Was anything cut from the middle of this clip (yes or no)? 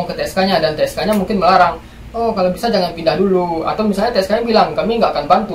no